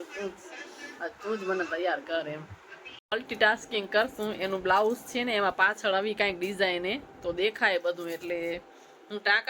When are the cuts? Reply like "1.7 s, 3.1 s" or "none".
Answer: 3.0 s